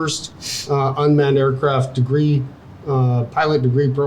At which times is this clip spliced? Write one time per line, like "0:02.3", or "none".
none